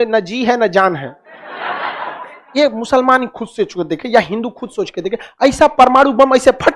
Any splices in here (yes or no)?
yes